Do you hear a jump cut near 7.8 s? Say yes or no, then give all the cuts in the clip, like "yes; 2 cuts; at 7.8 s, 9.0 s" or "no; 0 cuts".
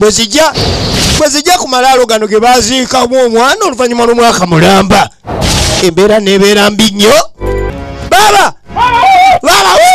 yes; 1 cut; at 7.8 s